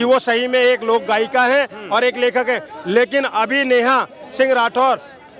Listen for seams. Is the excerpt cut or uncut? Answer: uncut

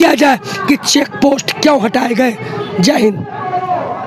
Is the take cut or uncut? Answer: uncut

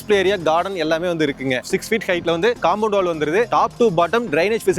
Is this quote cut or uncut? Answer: cut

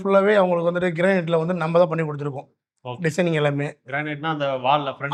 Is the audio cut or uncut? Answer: uncut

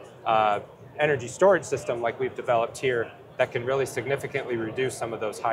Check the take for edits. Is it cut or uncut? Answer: uncut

